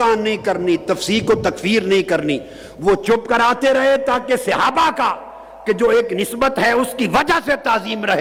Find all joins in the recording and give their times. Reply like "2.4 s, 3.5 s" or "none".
none